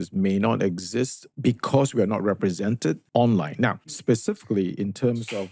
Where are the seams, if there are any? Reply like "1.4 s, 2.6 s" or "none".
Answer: 1.2 s, 3.0 s, 3.9 s